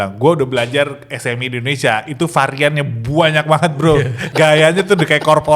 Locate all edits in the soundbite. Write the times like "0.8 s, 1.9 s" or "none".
4.2 s

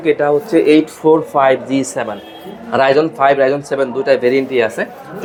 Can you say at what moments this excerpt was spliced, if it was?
none

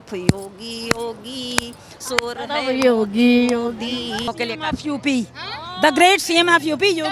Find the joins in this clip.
4.3 s

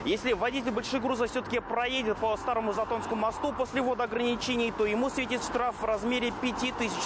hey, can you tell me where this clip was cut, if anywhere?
none

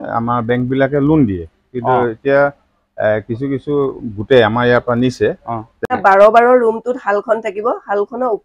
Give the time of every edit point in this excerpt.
5.7 s

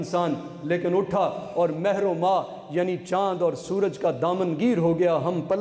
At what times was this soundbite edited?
none

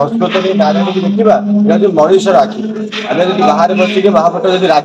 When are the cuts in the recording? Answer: none

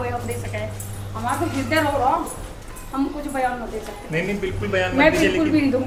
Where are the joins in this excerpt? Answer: none

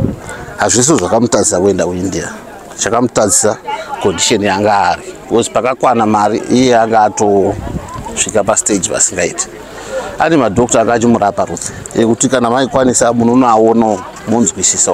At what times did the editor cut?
none

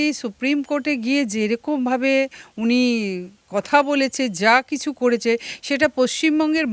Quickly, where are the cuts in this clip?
none

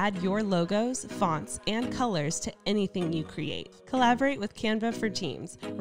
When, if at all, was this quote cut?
3.7 s

